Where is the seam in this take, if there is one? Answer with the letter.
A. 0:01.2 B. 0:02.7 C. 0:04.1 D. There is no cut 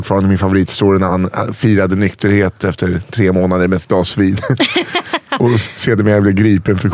D